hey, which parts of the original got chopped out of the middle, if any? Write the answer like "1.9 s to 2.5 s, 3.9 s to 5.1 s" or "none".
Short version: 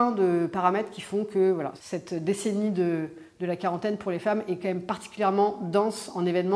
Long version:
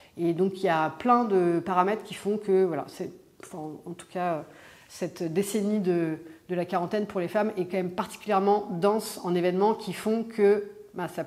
2.9 s to 4.9 s